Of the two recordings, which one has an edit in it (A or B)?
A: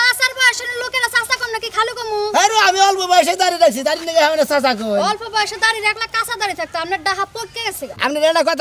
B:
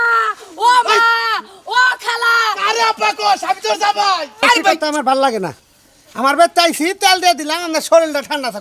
B